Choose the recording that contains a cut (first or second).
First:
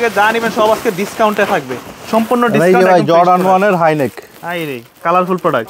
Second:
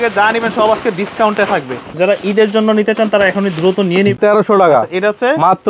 second